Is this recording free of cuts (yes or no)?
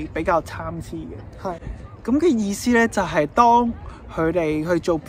yes